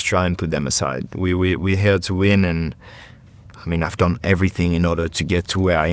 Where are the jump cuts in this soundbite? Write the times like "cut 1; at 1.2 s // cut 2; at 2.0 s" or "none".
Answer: none